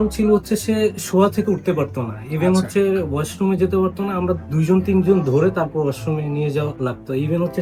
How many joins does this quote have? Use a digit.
0